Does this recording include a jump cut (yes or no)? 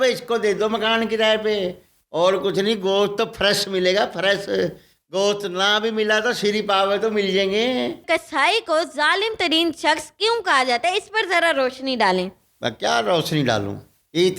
yes